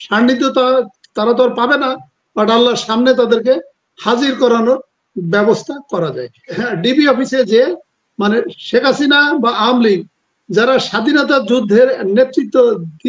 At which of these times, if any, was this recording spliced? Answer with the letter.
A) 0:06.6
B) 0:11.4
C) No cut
A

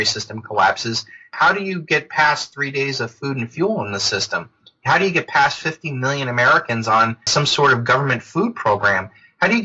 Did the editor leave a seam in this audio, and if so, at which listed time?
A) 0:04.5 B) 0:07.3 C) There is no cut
B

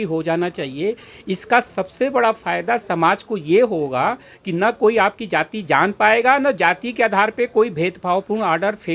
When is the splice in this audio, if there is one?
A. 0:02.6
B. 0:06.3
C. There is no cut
C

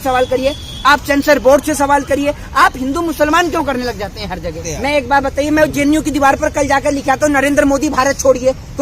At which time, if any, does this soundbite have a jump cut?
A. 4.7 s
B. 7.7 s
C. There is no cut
A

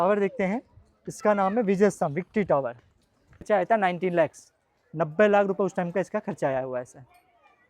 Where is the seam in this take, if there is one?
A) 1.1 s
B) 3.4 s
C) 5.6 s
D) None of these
B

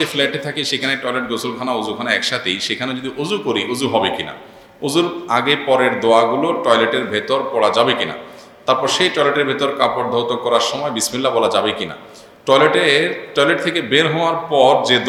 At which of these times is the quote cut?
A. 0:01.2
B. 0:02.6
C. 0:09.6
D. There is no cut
D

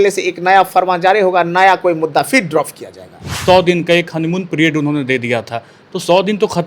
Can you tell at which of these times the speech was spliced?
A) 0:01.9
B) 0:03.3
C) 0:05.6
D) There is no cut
B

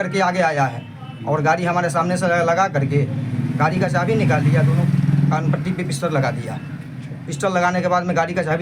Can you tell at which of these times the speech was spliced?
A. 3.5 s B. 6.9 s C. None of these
C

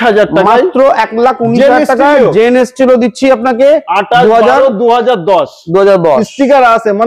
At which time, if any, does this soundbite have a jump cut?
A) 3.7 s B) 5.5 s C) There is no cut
C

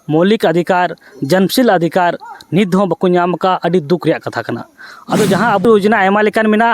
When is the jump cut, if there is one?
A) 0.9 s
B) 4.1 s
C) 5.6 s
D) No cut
C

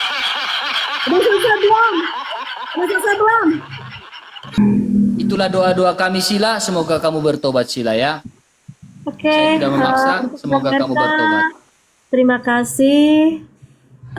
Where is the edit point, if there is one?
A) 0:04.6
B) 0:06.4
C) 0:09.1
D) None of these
A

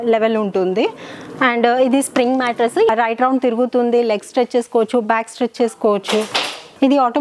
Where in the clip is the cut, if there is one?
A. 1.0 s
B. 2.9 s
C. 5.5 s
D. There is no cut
B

